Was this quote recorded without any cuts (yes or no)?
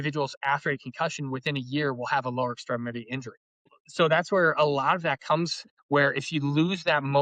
no